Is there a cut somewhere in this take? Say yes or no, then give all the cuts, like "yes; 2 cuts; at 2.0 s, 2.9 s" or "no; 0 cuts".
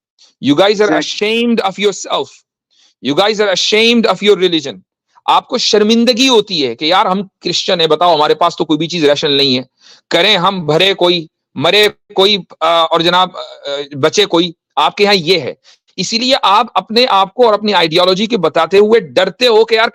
no; 0 cuts